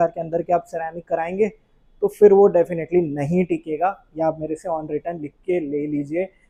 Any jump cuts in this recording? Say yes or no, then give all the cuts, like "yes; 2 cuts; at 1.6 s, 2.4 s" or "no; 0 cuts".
no; 0 cuts